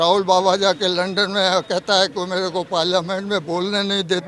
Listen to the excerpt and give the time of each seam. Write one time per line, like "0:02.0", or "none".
none